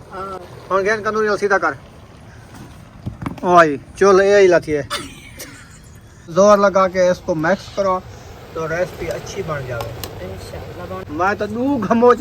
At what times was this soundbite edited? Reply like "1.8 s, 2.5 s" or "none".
6.3 s, 11.0 s